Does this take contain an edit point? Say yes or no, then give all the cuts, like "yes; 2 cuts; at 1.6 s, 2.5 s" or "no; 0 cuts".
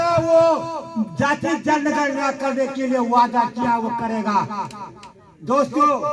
no; 0 cuts